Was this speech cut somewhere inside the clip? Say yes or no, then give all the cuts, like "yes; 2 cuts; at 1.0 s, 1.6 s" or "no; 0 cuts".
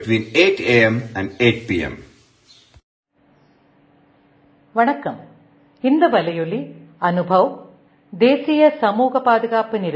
no; 0 cuts